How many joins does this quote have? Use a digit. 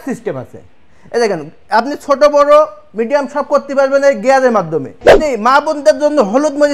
1